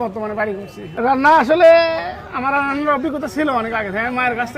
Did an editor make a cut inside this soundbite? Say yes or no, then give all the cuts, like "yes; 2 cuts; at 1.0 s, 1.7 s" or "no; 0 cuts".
no; 0 cuts